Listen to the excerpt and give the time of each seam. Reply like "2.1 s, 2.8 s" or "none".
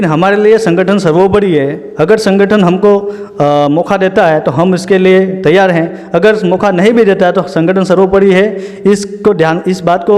none